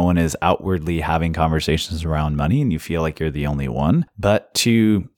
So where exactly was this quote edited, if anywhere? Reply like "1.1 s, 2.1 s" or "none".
4.1 s

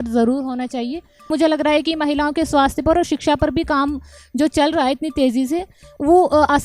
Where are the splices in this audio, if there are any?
1.3 s

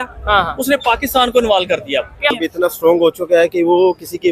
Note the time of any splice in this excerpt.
2.3 s

